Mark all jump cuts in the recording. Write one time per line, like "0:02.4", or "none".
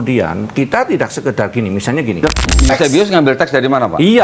0:02.2